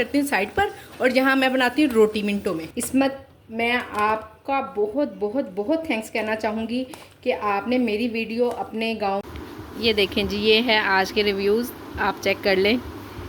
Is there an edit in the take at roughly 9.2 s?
yes; 2 cuts; at 2.7 s, 9.2 s

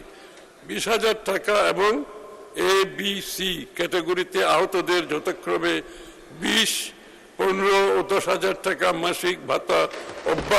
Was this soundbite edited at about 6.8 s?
no; 0 cuts

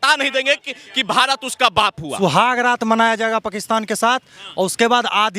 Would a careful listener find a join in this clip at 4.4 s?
no; 1 cut; at 2.2 s

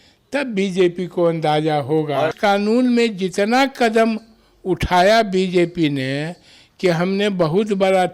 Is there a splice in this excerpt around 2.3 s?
yes; 1 cut; at 2.3 s

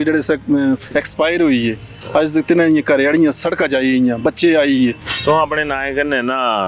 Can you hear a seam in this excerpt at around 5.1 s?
yes; 1 cut; at 5.1 s

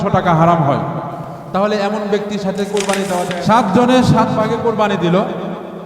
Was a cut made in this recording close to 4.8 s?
no; 2 cuts; at 1.2 s, 3.2 s

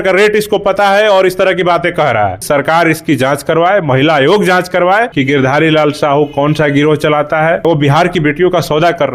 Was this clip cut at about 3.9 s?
no; 3 cuts; at 2.4 s, 5.1 s, 7.6 s

